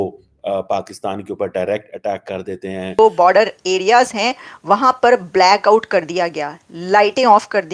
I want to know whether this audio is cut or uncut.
cut